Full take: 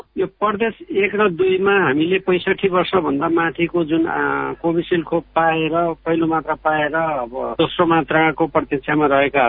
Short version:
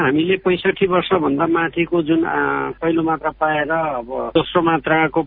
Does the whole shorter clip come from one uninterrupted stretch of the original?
no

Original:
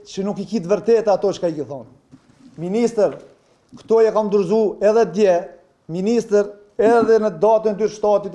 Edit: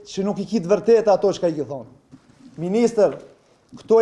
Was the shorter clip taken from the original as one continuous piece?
yes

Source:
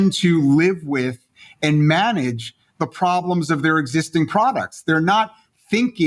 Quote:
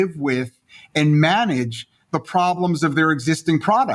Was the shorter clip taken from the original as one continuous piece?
yes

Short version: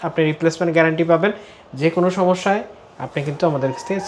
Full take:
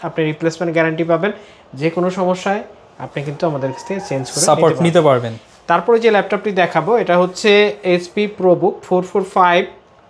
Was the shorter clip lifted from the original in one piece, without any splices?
yes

